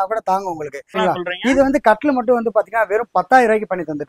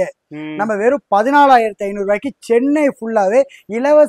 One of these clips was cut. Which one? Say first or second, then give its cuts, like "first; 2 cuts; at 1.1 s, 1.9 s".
first; 1 cut; at 1.0 s